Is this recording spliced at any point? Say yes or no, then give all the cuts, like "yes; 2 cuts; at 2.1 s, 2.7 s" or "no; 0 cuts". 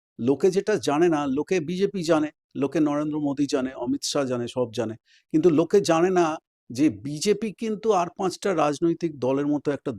no; 0 cuts